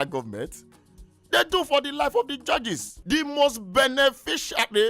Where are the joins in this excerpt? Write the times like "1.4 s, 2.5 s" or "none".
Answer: 2.9 s